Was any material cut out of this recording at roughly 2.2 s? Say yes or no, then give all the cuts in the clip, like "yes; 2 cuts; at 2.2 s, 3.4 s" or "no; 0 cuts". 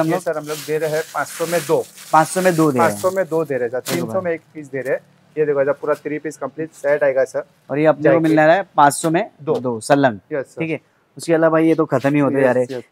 no; 0 cuts